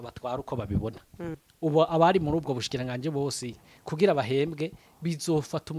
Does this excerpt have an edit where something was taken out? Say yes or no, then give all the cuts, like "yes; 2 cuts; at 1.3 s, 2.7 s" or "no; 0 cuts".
yes; 1 cut; at 1.4 s